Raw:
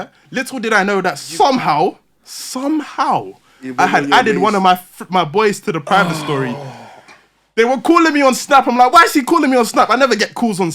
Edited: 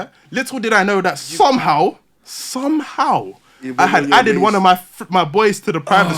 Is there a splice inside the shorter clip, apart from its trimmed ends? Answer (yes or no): no